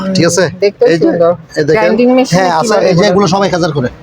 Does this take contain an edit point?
yes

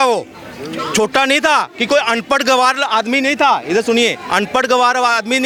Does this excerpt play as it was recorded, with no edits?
yes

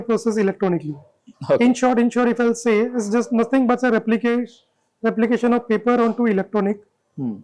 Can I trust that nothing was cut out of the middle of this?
yes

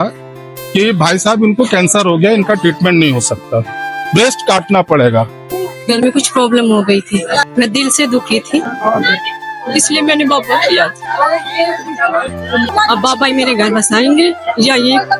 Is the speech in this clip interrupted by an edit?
yes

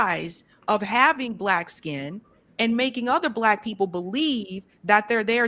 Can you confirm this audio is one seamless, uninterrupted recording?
yes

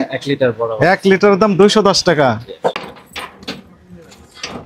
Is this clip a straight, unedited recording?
no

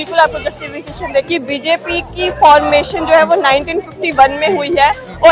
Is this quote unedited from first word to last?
no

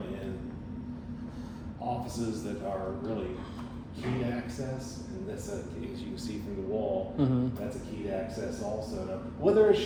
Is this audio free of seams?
yes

